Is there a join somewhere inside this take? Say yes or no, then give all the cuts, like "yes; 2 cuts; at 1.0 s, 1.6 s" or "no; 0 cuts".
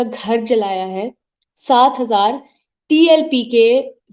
no; 0 cuts